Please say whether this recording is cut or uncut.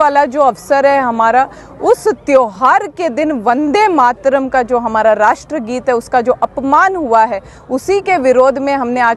uncut